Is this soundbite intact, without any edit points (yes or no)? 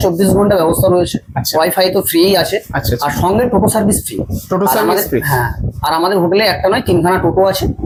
yes